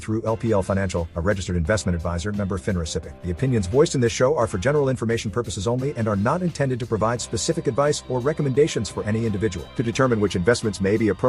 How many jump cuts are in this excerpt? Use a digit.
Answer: 1